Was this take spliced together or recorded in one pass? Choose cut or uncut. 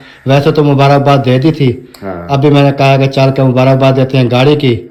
uncut